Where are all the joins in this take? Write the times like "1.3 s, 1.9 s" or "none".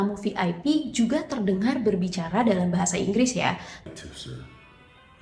none

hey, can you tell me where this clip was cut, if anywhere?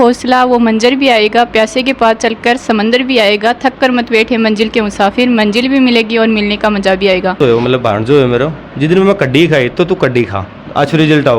7.4 s

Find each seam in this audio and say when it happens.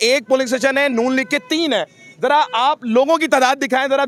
none

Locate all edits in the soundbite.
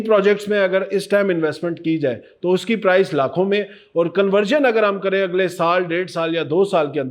none

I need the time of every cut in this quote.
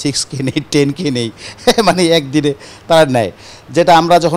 none

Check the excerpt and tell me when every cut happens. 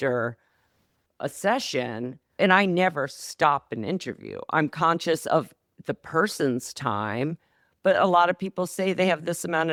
none

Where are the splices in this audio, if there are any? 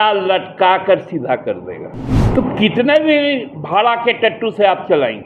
2.2 s

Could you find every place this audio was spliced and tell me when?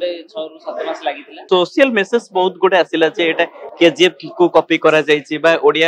1.4 s

